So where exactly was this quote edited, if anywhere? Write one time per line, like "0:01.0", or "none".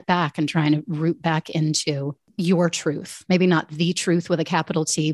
0:02.2